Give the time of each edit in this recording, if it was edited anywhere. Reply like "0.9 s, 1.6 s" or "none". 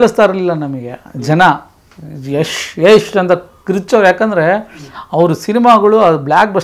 none